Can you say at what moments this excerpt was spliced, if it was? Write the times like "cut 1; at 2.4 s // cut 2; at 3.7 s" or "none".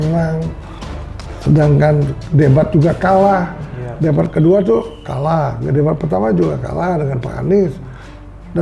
none

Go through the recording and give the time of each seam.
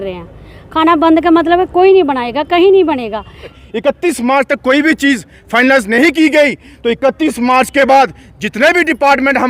cut 1; at 3.6 s

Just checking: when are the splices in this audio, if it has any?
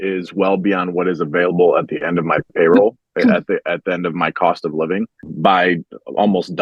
cut 1; at 5.3 s

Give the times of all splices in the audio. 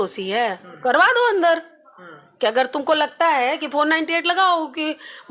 none

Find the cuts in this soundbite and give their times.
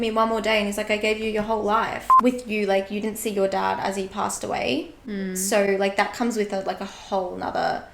cut 1; at 2.1 s

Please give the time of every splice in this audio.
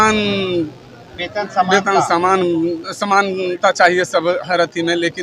none

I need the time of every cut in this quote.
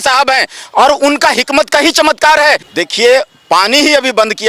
cut 1; at 2.7 s

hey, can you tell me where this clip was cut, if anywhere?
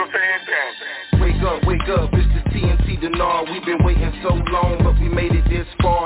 none

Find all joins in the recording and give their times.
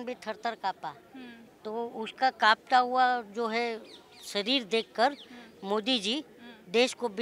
none

